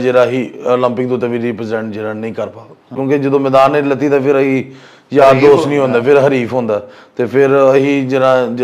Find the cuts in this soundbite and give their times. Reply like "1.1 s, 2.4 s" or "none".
2.9 s